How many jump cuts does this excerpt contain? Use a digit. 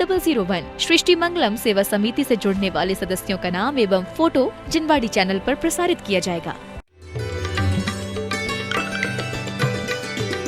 1